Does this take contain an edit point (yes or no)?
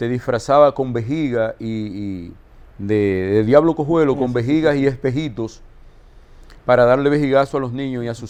no